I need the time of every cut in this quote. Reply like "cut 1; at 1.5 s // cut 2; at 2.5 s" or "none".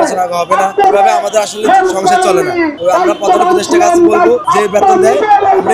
cut 1; at 0.8 s // cut 2; at 2.7 s // cut 3; at 4.4 s